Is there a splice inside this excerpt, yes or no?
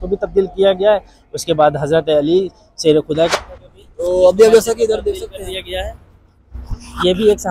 yes